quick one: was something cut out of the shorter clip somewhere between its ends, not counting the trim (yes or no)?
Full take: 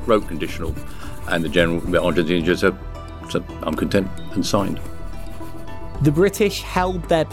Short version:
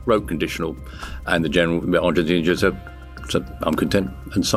no